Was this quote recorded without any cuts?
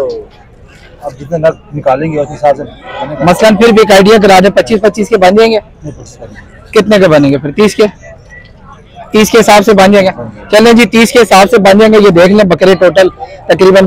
yes; 0 cuts

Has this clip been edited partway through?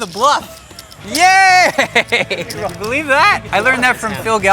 yes; 1 cut; at 2.4 s

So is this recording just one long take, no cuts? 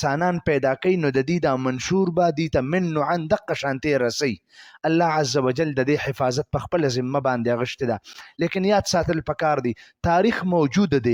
yes; 0 cuts

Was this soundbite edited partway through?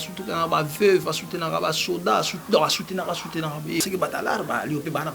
yes; 1 cut; at 3.8 s

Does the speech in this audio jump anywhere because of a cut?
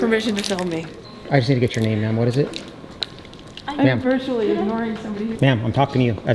yes; 2 cuts; at 1.0 s, 5.3 s

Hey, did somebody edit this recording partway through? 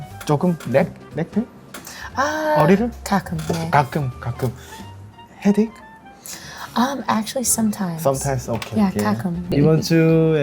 yes; 1 cut; at 9.5 s

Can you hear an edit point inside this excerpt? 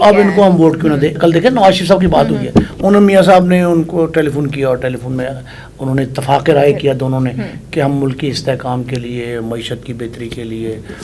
yes; 1 cut; at 1.2 s

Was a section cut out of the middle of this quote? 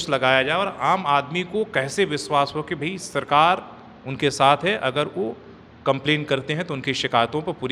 no; 0 cuts

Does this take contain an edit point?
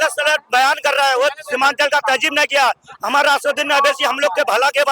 no; 0 cuts

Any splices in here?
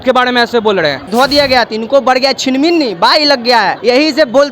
yes; 1 cut; at 1.1 s

